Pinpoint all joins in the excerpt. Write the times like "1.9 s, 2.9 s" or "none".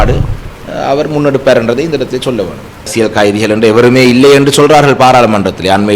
2.9 s